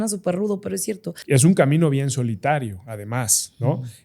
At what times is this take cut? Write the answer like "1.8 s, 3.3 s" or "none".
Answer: 1.1 s

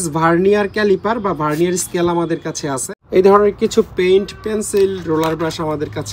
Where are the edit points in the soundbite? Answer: 2.9 s

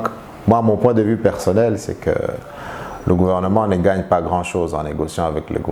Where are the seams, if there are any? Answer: none

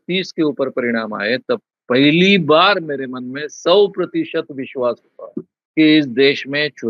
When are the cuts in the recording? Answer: 5.6 s

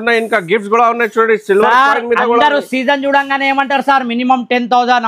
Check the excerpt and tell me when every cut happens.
none

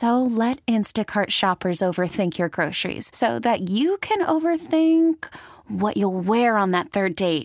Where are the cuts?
none

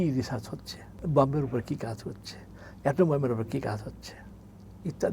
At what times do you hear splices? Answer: 1.0 s

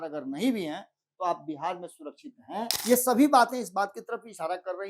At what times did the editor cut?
2.7 s

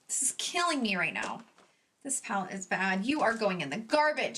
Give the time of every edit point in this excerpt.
1.9 s

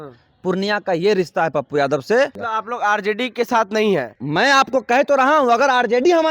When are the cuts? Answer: 2.4 s, 4.2 s

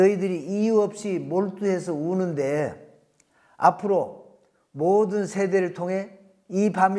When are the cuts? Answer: none

